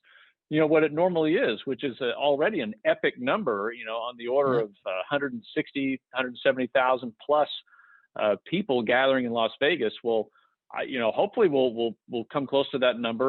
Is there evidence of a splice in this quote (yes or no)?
no